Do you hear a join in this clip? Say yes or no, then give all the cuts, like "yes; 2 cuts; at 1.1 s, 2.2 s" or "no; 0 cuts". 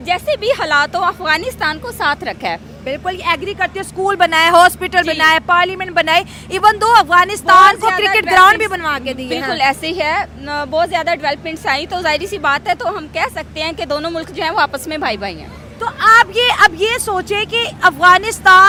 no; 0 cuts